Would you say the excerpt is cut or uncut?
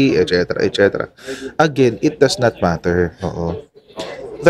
uncut